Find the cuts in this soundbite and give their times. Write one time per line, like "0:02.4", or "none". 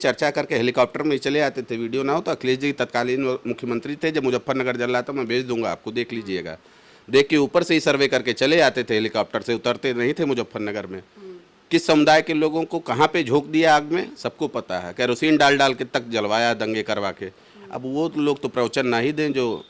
none